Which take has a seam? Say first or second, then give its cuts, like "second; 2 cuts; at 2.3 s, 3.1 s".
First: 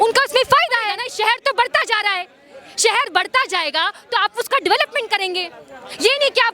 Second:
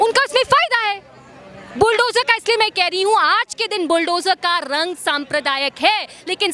first; 1 cut; at 1.0 s